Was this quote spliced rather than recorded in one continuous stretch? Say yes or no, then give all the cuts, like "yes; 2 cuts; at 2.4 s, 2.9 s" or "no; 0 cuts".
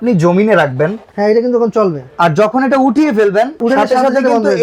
yes; 2 cuts; at 1.1 s, 3.6 s